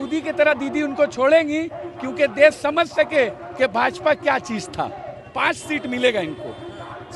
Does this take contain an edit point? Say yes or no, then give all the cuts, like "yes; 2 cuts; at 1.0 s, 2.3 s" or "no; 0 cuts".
no; 0 cuts